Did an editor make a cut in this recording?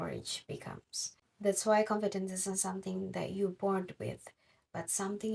no; 0 cuts

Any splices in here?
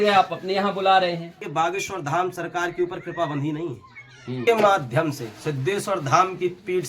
yes; 2 cuts; at 1.4 s, 4.4 s

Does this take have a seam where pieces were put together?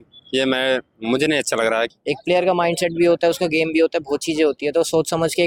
yes; 1 cut; at 1.9 s

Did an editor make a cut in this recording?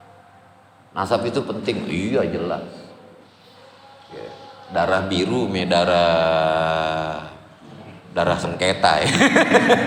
no; 0 cuts

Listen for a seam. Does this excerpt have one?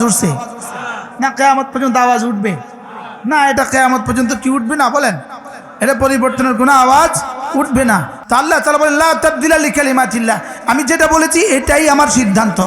yes; 1 cut; at 8.2 s

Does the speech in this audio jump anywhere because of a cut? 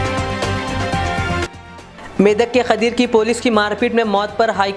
yes; 1 cut; at 1.1 s

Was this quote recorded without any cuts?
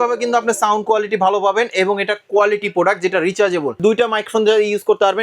no; 1 cut; at 3.8 s

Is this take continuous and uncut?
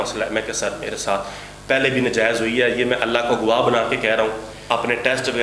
no; 1 cut; at 4.5 s

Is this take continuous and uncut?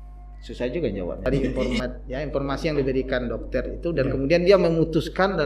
no; 1 cut; at 1.3 s

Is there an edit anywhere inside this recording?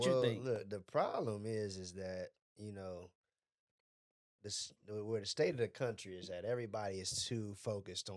no; 0 cuts

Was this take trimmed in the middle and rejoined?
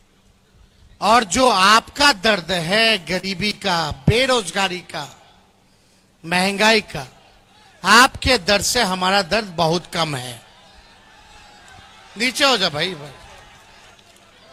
no; 0 cuts

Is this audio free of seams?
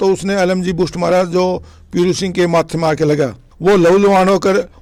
yes; 0 cuts

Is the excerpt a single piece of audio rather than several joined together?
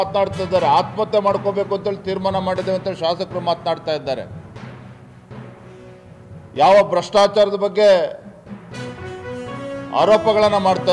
no; 4 cuts; at 4.3 s, 5.8 s, 8.3 s, 9.6 s

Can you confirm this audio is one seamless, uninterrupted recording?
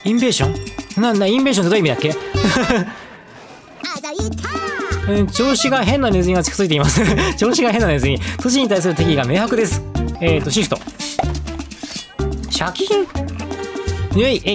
no; 2 cuts; at 3.8 s, 10.1 s

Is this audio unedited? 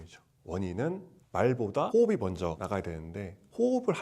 no; 1 cut; at 1.3 s

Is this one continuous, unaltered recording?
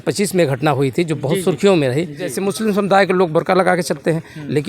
no; 1 cut; at 2.4 s

